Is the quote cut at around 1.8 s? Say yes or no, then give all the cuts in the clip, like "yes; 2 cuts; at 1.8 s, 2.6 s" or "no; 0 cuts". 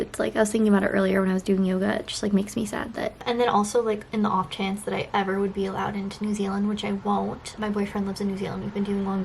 no; 2 cuts; at 3.2 s, 7.5 s